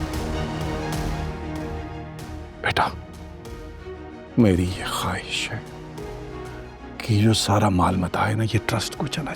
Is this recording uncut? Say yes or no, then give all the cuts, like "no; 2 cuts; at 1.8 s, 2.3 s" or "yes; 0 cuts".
yes; 0 cuts